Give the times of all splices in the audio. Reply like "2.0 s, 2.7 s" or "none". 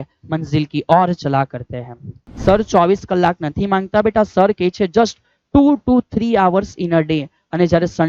2.2 s